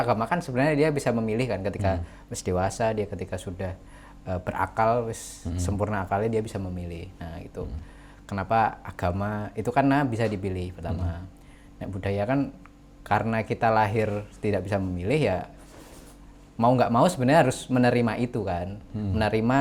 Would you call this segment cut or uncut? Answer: uncut